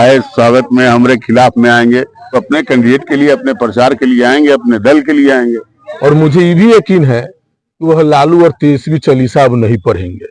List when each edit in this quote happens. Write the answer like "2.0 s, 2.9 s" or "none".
2.4 s, 5.9 s